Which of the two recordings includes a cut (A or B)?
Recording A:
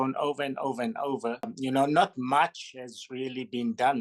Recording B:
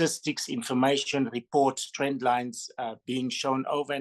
A